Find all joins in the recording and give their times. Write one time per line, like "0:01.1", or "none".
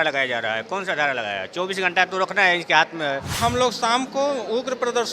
0:03.4